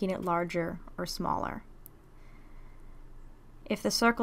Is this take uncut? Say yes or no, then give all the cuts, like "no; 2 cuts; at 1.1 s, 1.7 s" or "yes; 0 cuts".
no; 1 cut; at 1.8 s